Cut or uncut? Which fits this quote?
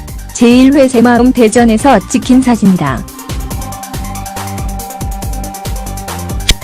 uncut